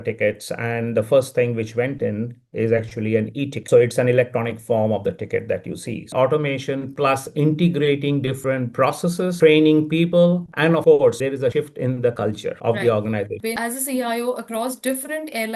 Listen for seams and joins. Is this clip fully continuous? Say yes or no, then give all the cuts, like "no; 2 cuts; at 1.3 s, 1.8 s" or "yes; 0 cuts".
no; 2 cuts; at 6.1 s, 13.4 s